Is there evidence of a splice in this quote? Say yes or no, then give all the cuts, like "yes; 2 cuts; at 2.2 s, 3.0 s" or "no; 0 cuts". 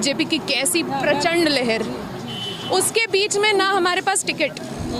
no; 0 cuts